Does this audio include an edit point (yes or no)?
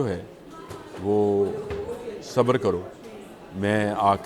no